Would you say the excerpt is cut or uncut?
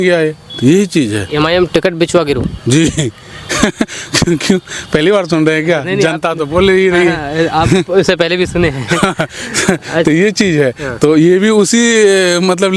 uncut